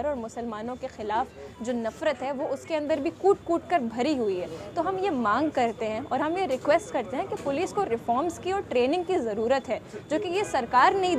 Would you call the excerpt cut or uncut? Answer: uncut